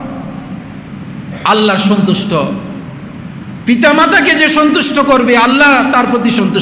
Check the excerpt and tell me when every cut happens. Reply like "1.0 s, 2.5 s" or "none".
none